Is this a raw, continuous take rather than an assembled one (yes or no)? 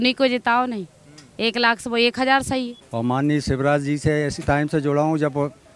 no